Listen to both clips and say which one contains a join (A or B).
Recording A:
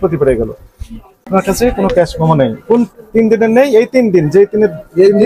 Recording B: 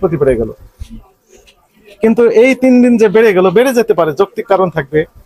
A